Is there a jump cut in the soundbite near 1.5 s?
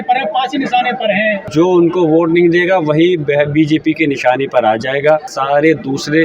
yes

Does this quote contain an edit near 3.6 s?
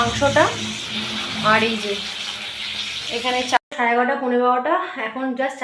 yes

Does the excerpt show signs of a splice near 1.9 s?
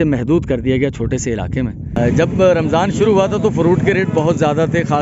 yes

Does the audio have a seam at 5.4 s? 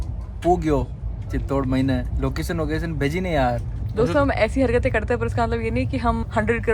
no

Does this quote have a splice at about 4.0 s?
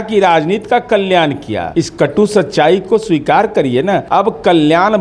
yes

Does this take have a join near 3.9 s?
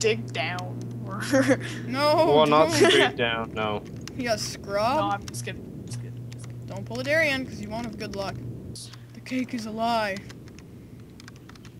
no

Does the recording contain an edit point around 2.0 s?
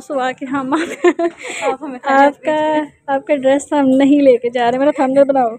no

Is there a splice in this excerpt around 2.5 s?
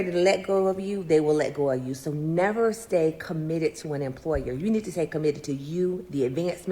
yes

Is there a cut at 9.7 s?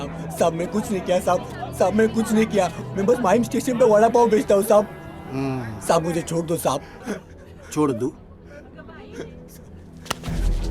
no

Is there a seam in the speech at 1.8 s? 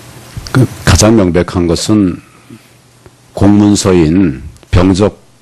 yes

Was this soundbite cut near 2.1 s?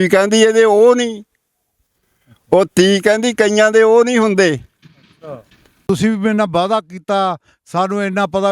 no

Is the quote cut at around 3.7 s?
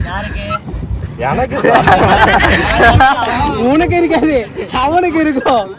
no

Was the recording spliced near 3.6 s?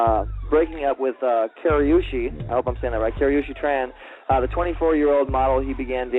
yes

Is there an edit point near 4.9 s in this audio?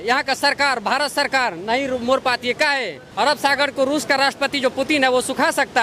no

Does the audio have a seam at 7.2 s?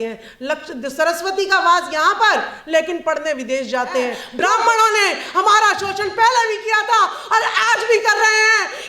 no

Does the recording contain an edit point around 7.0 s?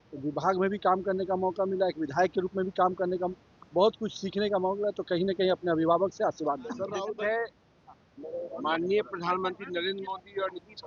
yes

